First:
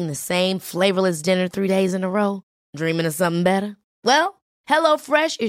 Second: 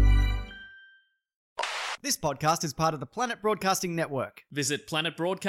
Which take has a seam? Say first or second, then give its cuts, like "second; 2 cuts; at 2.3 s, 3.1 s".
second; 1 cut; at 1.8 s